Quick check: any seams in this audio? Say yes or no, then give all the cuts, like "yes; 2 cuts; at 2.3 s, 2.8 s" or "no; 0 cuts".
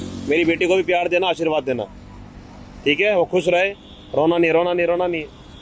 no; 0 cuts